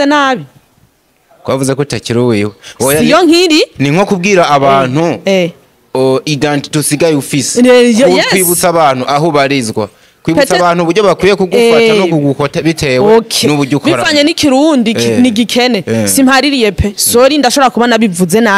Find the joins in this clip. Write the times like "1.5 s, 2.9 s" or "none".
none